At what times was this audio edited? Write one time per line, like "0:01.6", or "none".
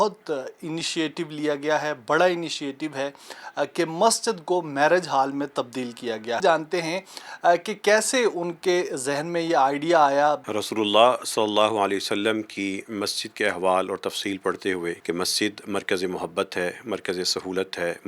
0:06.4
0:10.4
0:15.0